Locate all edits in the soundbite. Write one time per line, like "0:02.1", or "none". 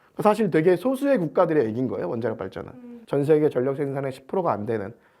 0:02.9